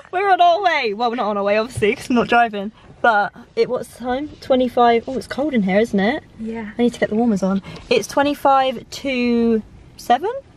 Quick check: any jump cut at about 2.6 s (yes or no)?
no